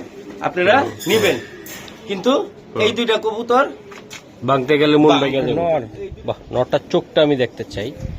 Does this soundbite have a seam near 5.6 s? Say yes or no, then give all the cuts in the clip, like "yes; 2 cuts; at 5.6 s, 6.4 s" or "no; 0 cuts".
yes; 1 cut; at 5.6 s